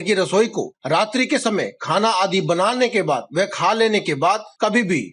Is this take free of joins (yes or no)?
yes